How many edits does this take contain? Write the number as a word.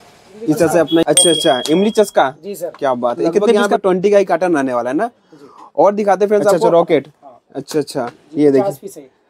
three